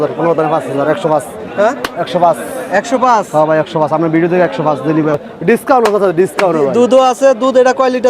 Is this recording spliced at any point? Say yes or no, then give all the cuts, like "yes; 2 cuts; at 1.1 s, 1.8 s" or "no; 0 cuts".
yes; 1 cut; at 5.3 s